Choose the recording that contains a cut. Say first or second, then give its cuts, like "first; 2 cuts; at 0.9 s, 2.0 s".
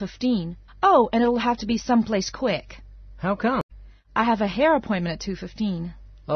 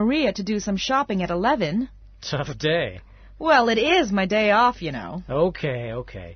first; 1 cut; at 1.6 s